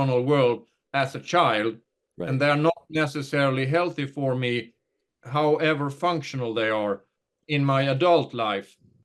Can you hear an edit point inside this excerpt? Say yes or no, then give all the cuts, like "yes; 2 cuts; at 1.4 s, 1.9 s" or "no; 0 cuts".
yes; 2 cuts; at 5.2 s, 7.3 s